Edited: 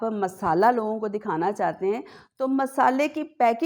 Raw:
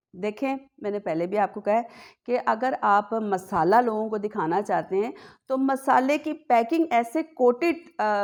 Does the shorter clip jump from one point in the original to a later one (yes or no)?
no